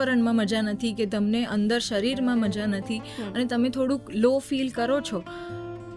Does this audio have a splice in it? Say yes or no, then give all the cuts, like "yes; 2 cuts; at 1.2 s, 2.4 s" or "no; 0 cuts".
no; 0 cuts